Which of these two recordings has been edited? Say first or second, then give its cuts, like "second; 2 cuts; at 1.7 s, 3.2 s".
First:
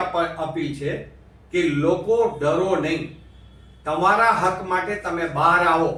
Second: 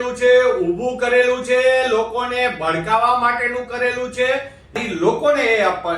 second; 1 cut; at 4.8 s